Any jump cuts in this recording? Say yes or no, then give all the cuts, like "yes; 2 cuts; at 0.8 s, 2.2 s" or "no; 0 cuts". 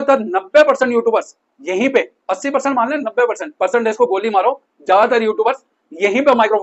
no; 0 cuts